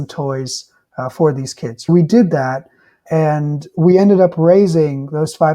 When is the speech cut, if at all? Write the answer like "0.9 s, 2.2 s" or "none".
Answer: 1.9 s, 3.0 s